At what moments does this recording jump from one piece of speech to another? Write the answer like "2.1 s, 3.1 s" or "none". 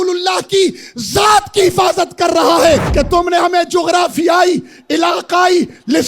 2.9 s